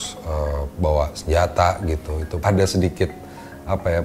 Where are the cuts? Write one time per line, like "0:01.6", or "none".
0:02.4